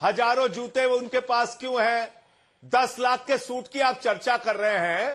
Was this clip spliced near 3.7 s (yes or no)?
no